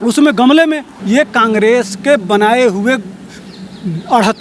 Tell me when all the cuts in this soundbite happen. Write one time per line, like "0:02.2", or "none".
0:00.9